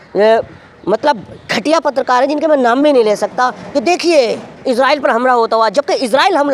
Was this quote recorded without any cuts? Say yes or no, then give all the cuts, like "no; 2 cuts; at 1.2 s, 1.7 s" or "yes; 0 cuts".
yes; 0 cuts